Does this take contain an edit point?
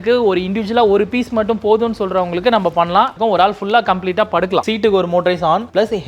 yes; 2 cuts; at 3.1 s, 4.6 s

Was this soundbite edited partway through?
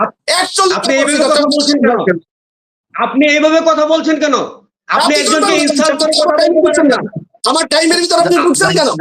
no; 0 cuts

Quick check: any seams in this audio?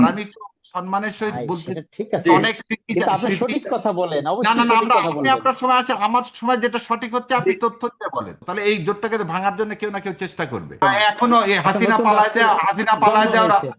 yes; 2 cuts; at 8.4 s, 10.8 s

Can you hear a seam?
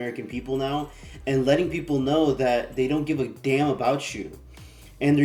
no; 0 cuts

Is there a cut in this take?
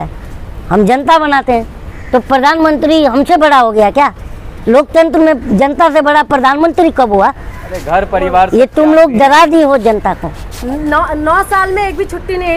no; 0 cuts

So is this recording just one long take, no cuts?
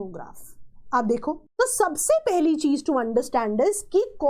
no; 1 cut; at 1.5 s

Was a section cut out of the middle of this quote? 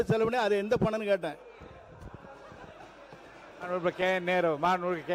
no; 0 cuts

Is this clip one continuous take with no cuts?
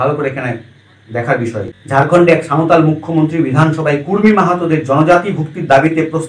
no; 1 cut; at 1.7 s

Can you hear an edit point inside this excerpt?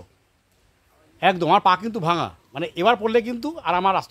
no; 0 cuts

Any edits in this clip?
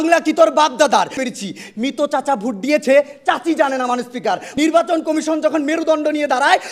yes; 2 cuts; at 1.2 s, 4.5 s

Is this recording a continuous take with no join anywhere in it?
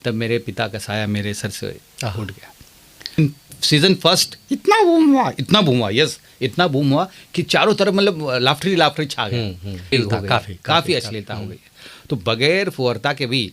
no; 2 cuts; at 3.2 s, 9.9 s

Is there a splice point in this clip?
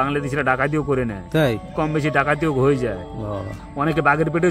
no; 0 cuts

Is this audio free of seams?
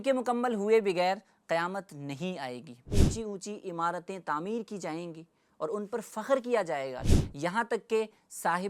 no; 2 cuts; at 2.9 s, 7.0 s

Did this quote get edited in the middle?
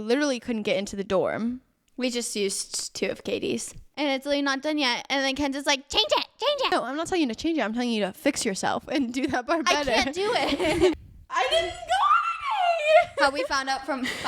yes; 2 cuts; at 3.8 s, 11.1 s

